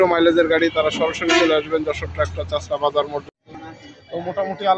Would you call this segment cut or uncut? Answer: cut